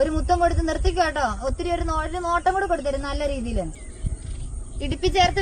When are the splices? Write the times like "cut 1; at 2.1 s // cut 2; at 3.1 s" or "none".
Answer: cut 1; at 3.8 s